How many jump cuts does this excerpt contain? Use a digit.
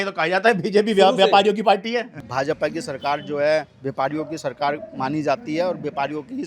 1